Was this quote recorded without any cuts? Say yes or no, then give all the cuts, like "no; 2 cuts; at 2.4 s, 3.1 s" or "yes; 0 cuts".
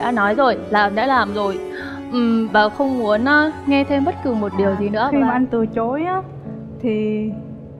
no; 1 cut; at 5.1 s